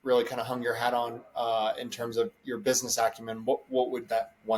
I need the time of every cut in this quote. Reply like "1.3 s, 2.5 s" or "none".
none